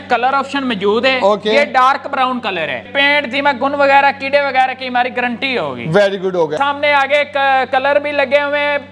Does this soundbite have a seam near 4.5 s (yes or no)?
no